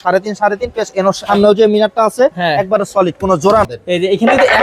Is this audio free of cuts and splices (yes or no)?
no